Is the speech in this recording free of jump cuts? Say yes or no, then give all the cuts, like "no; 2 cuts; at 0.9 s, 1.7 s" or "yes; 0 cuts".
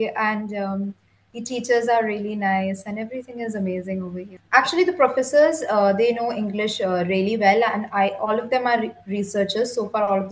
no; 1 cut; at 4.3 s